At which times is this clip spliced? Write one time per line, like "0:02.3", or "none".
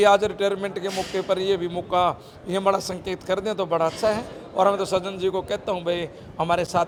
none